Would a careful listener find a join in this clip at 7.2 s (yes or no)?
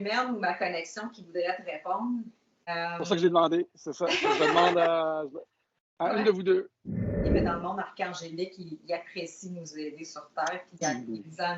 yes